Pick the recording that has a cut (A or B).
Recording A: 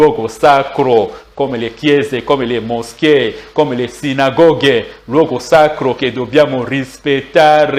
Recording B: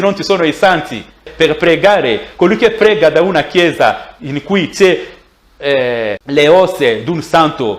B